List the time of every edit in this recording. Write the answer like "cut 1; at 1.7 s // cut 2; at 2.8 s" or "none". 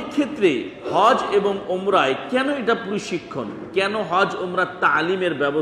none